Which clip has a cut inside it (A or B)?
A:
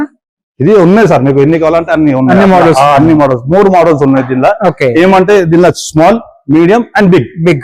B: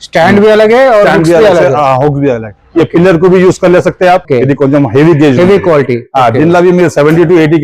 B